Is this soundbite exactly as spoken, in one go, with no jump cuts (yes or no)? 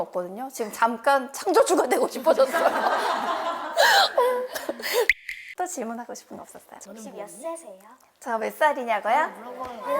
no